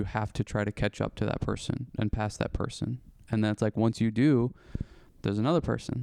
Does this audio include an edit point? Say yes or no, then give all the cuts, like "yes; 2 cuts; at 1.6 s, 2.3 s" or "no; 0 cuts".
no; 0 cuts